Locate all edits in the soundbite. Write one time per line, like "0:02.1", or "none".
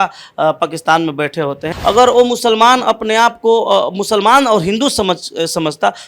0:01.7